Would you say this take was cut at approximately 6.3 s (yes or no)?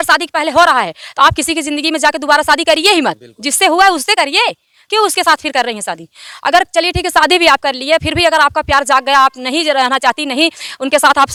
no